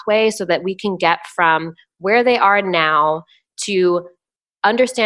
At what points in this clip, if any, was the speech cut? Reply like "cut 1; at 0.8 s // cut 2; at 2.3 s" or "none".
none